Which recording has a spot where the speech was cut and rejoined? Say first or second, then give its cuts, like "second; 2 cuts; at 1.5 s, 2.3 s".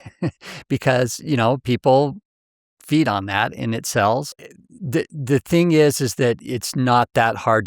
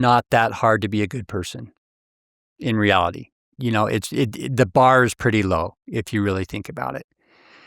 first; 1 cut; at 4.4 s